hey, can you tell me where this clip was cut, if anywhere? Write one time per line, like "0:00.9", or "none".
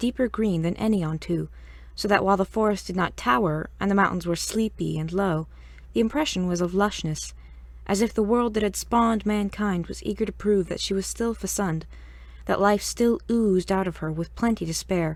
none